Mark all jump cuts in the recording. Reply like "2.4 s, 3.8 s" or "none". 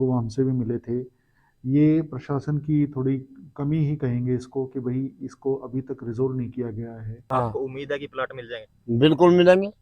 7.1 s